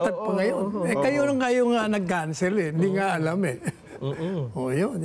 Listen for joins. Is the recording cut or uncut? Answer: uncut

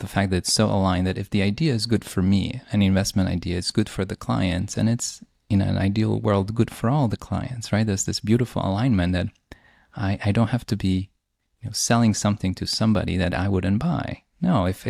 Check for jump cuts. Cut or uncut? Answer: uncut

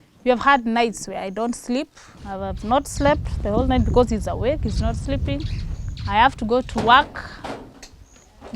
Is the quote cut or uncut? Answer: uncut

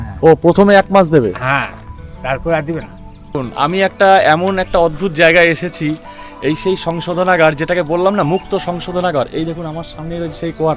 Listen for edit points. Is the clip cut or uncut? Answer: cut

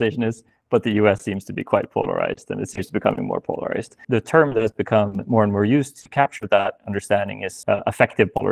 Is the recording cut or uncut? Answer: cut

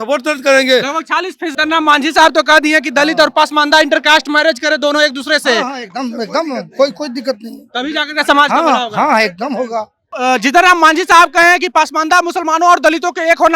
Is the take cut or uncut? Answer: cut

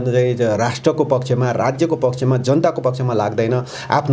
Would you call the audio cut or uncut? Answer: uncut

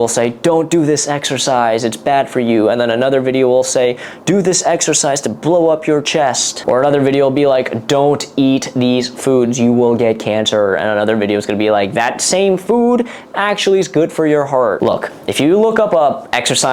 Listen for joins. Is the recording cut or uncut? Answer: uncut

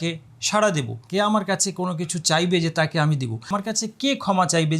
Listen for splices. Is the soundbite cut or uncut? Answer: cut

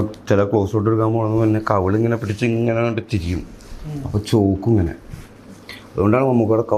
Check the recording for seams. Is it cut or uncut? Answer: uncut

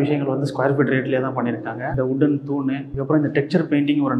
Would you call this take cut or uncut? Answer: cut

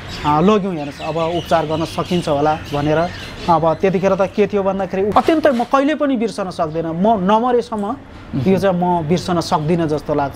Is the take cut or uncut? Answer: cut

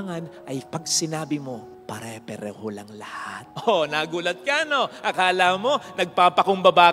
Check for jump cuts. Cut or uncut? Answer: cut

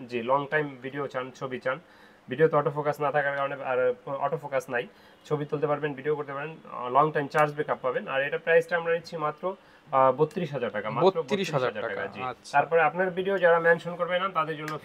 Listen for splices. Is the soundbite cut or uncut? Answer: uncut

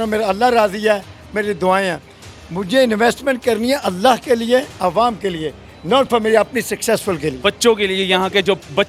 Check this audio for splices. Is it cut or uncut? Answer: uncut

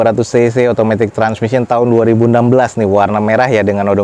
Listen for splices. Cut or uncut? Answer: uncut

